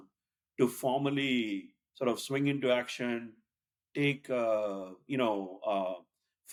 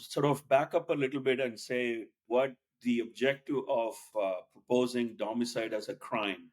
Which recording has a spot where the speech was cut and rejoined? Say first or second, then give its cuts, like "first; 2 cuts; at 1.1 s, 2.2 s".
second; 2 cuts; at 2.2 s, 4.1 s